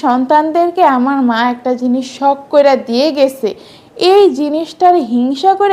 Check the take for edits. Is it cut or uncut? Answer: uncut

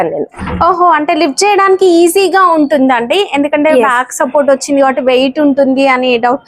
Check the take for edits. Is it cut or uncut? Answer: uncut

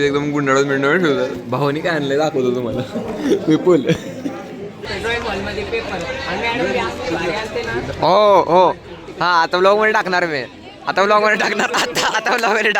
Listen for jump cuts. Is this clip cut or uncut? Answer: cut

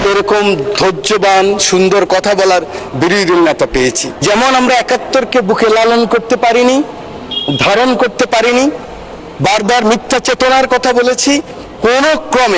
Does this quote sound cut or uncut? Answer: cut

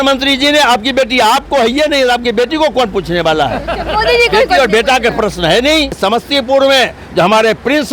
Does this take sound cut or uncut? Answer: cut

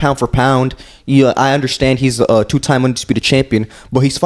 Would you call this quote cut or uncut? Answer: uncut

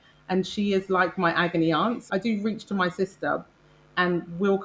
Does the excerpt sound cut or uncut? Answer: cut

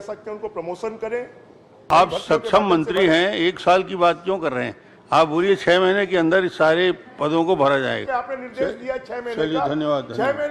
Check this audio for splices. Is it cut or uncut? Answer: cut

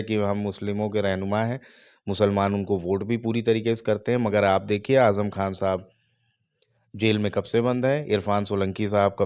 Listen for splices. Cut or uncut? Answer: uncut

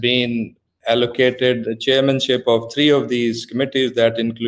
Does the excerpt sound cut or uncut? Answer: uncut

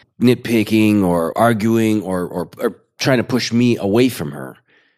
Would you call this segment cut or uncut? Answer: cut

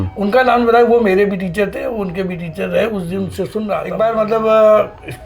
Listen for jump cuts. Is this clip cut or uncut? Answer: cut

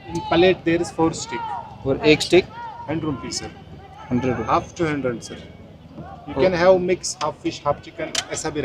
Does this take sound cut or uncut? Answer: uncut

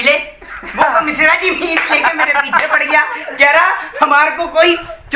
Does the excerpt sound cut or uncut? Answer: uncut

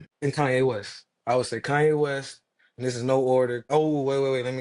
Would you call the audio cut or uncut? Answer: cut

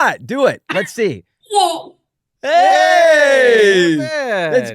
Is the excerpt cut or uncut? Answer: cut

